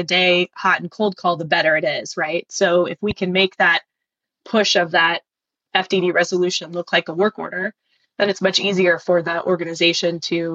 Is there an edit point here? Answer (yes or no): no